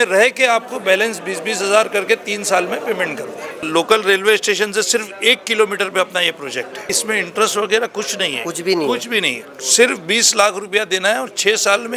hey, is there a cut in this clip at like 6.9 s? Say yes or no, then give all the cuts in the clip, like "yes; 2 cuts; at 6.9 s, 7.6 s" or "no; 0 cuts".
yes; 2 cuts; at 3.7 s, 6.9 s